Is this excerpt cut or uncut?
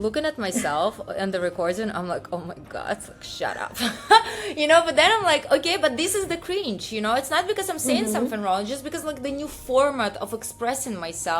uncut